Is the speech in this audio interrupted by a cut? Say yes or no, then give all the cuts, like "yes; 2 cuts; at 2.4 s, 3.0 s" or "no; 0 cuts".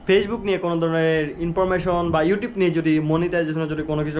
no; 0 cuts